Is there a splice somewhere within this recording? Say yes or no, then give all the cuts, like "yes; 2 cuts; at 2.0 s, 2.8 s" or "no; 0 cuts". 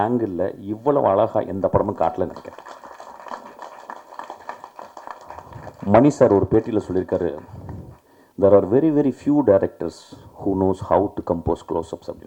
no; 0 cuts